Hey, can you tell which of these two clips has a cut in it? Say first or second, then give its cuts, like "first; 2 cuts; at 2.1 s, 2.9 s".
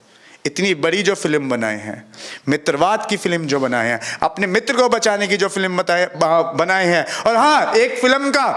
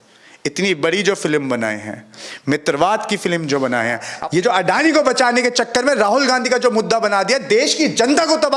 second; 1 cut; at 4.1 s